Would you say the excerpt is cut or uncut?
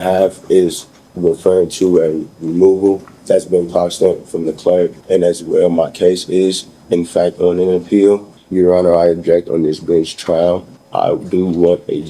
cut